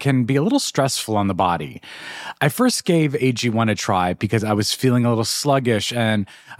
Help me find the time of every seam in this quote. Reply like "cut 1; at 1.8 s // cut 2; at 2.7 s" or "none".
none